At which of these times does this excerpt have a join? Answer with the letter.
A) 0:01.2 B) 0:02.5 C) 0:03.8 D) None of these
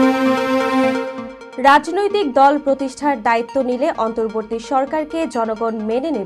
A